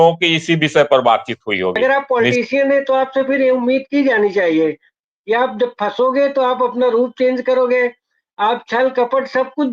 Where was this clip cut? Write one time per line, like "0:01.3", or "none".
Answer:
0:01.8

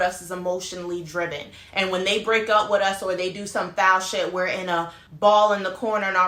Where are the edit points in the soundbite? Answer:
none

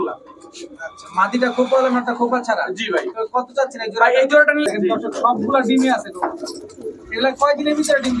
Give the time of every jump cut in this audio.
0:04.6

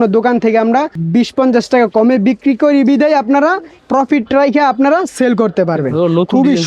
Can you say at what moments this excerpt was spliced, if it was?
0:01.0
0:03.7

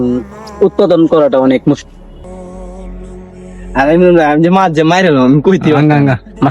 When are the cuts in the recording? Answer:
0:02.2

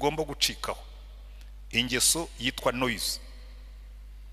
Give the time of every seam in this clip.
none

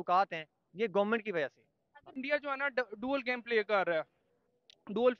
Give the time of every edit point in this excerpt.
0:02.1

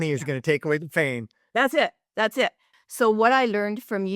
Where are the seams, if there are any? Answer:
0:02.7

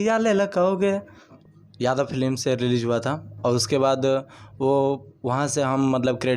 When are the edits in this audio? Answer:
0:01.4

